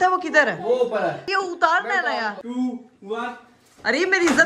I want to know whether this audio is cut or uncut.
cut